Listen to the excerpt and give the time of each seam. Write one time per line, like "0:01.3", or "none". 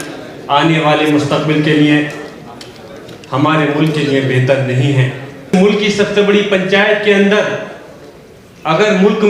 0:05.5

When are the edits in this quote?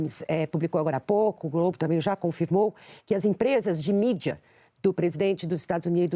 none

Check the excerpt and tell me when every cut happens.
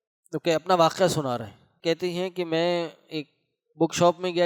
0:01.6

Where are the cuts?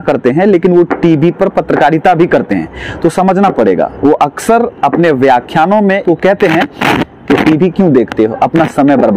none

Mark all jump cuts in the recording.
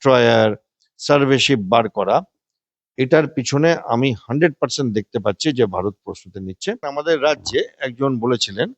0:06.9

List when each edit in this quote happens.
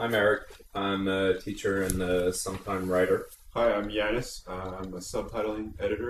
0:03.9

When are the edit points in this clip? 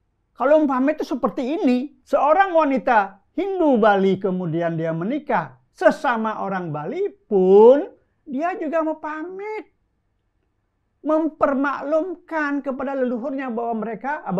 0:02.0

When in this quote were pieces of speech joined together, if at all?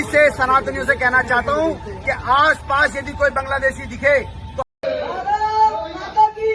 none

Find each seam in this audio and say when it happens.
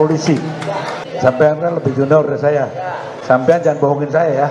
0:01.0

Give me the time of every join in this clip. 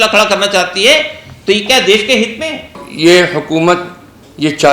0:02.8

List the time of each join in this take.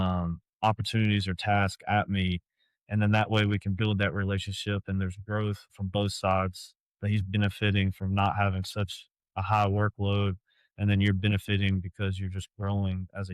0:05.7

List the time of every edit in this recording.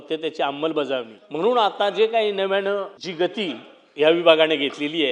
0:01.2
0:03.0

